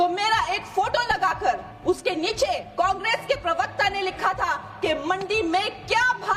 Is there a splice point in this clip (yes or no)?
yes